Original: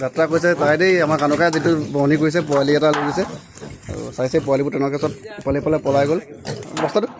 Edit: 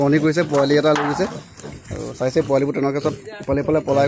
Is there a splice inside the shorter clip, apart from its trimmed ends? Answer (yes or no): no